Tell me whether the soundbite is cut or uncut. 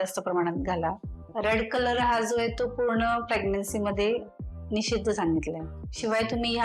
cut